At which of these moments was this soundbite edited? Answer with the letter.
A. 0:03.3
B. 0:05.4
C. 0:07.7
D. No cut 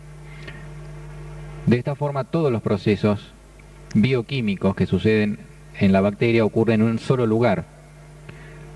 B